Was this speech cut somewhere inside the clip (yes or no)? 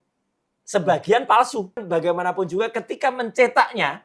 yes